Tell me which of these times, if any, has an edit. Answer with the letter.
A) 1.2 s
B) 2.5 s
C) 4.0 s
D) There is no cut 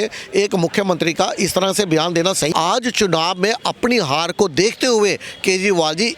B